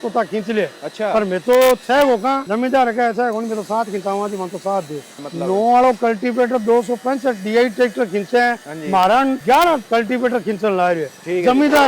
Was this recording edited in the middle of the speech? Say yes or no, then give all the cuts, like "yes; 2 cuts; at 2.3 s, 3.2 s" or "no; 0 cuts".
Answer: yes; 3 cuts; at 2.4 s, 5.2 s, 9.5 s